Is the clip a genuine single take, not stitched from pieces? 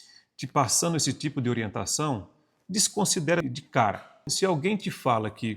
yes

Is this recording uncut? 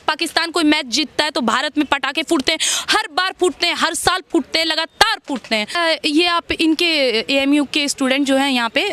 no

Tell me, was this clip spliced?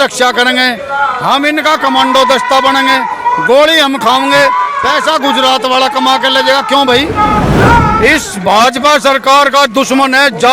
yes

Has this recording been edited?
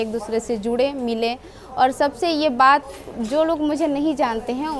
no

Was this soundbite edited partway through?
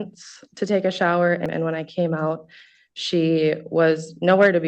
yes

